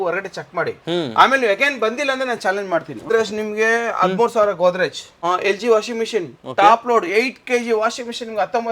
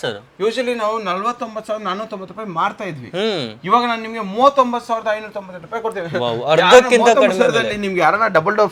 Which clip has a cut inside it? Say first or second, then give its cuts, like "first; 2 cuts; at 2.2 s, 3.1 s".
first; 2 cuts; at 3.1 s, 5.1 s